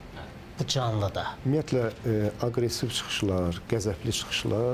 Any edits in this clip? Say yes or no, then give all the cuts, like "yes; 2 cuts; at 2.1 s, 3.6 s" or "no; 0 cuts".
yes; 1 cut; at 1.4 s